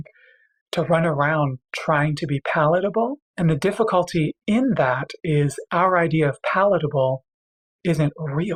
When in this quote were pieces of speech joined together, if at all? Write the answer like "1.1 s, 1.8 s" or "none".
none